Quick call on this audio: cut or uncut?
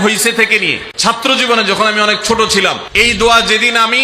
cut